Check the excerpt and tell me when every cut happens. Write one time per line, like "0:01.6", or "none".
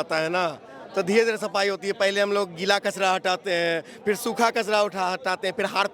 none

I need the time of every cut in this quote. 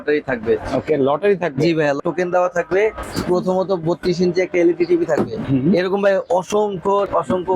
0:02.0
0:03.0
0:05.4

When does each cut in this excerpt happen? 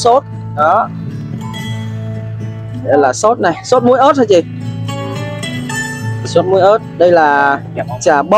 0:01.4
0:02.8

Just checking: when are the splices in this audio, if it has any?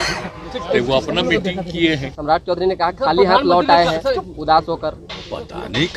0:02.1

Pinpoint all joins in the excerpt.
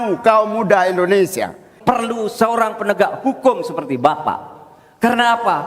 0:01.7

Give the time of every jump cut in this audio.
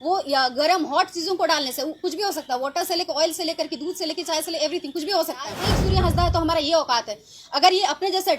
0:05.7

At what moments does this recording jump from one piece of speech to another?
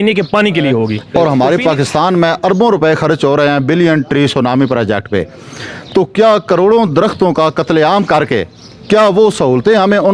0:01.0

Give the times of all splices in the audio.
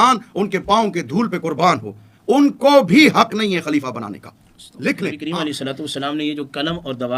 0:05.2

